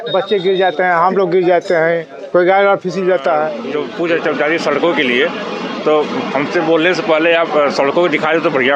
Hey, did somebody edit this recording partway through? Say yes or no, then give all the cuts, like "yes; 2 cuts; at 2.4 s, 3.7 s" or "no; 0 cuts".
yes; 1 cut; at 3.6 s